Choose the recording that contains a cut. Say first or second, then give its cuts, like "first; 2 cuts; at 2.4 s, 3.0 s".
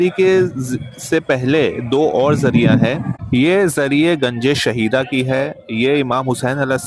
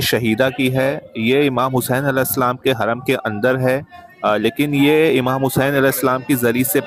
first; 1 cut; at 3.1 s